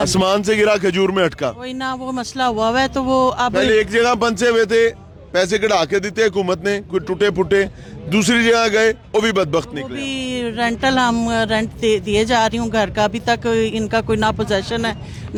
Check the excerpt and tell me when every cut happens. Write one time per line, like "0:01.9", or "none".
none